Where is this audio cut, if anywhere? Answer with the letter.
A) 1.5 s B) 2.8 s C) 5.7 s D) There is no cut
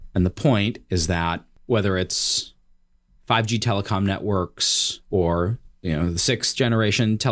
A